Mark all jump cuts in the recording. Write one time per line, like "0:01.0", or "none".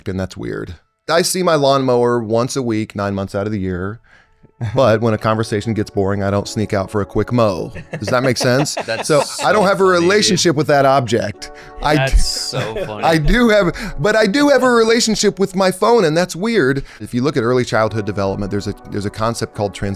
0:01.1
0:17.0